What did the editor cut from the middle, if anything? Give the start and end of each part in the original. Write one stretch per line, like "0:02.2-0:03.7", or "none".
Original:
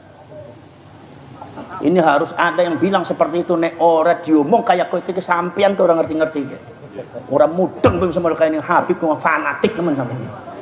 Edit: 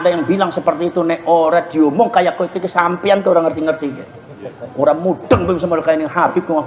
none